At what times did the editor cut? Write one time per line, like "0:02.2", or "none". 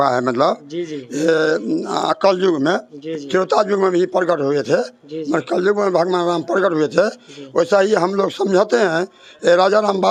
none